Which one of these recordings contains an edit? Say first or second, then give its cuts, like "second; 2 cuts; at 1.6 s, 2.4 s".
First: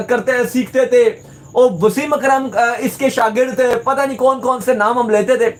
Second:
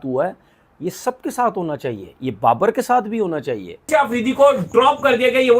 second; 1 cut; at 3.8 s